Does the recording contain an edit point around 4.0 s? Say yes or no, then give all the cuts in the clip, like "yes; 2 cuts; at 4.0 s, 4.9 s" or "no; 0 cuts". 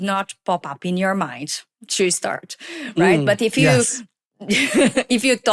no; 0 cuts